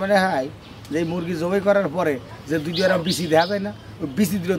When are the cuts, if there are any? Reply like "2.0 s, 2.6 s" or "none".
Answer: none